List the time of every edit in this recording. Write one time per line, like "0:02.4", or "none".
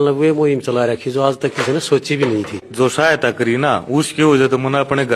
0:02.6